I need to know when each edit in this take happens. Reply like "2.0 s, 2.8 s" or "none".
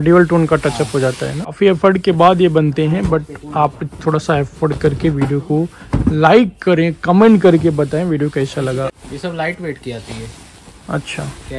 1.5 s, 8.9 s